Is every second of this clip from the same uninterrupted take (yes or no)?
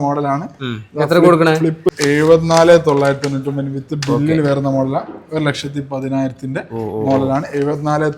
no